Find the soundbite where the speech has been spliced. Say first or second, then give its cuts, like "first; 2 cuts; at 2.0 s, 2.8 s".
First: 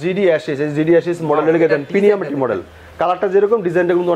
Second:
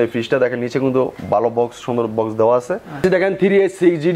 second; 1 cut; at 3.0 s